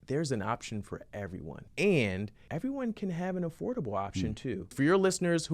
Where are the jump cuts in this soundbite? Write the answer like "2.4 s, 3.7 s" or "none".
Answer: 1.6 s, 2.4 s, 4.7 s